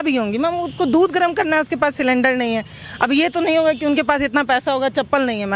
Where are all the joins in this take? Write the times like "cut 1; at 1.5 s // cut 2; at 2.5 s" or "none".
none